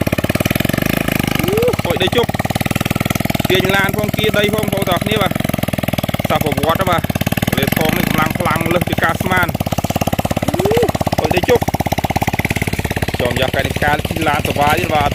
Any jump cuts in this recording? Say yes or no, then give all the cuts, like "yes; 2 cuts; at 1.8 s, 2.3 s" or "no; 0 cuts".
no; 0 cuts